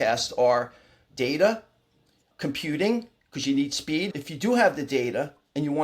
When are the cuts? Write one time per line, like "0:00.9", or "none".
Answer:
0:04.1